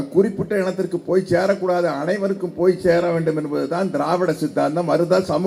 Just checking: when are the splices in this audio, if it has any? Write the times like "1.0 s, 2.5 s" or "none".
none